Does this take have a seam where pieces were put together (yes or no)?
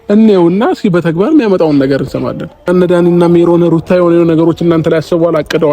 yes